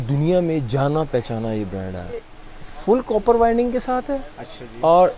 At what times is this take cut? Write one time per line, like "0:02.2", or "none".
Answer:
0:02.4